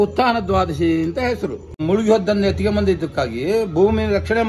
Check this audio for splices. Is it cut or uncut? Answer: cut